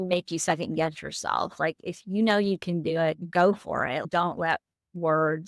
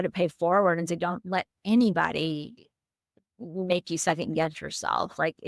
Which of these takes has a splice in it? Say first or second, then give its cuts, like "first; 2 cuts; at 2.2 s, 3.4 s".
first; 2 cuts; at 3.2 s, 4.0 s